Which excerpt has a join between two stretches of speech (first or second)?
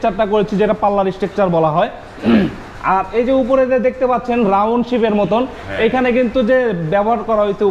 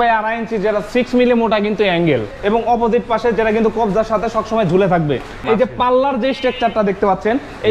second